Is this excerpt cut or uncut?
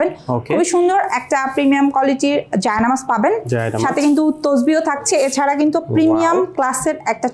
uncut